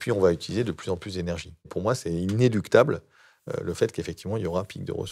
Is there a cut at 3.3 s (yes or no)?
no